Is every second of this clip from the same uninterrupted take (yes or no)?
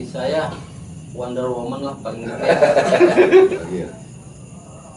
no